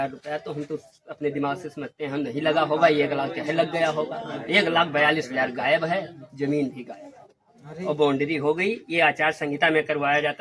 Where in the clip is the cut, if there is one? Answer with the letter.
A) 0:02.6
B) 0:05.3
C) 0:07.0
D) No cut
D